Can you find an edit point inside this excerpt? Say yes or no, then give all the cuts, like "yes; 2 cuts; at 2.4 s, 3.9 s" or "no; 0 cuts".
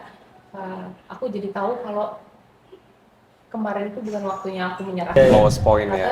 yes; 1 cut; at 5.2 s